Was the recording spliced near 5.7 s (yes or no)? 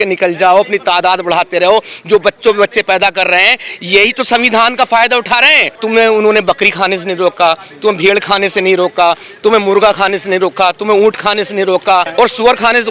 yes